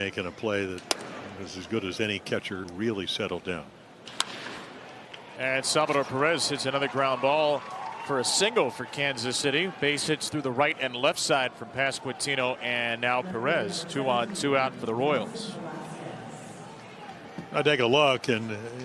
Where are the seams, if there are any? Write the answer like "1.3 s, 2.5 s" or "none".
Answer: 2.7 s